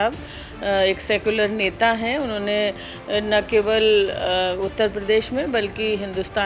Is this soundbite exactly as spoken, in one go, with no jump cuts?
yes; 0 cuts

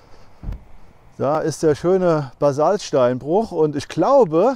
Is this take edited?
no; 0 cuts

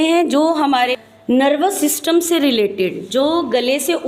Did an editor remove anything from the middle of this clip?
yes; 1 cut; at 0.9 s

